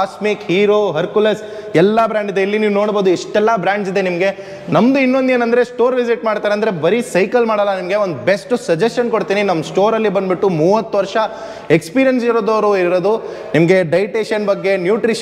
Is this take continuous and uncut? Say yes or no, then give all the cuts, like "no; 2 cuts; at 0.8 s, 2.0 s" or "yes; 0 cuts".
yes; 0 cuts